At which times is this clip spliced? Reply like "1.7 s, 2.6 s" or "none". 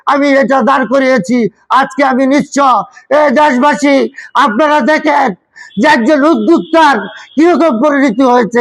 none